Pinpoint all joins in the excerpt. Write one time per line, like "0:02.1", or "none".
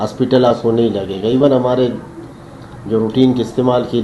none